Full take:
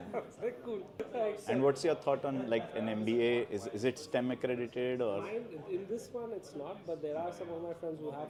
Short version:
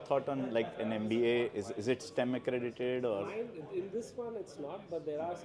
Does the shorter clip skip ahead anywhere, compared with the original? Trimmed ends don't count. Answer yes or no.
no